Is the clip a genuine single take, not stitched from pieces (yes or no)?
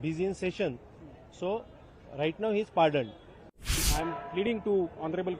no